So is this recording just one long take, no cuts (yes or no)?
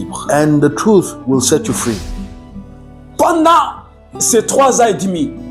no